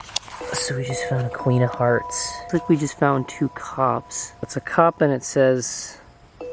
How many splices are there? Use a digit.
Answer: 2